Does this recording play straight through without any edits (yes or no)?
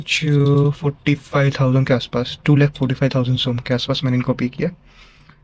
yes